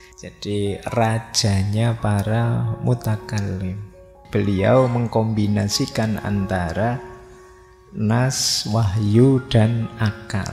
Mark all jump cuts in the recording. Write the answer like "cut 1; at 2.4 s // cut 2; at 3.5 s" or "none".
cut 1; at 4.2 s